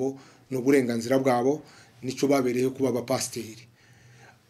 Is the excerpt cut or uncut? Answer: uncut